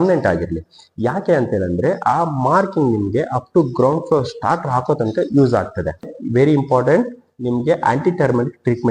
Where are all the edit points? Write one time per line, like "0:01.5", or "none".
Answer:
0:06.1